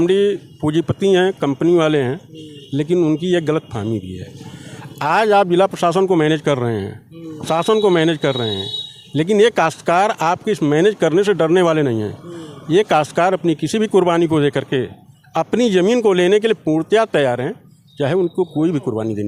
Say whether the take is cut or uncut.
uncut